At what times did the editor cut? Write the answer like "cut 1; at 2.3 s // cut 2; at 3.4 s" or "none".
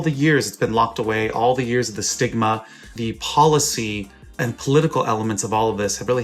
cut 1; at 2.9 s // cut 2; at 4.4 s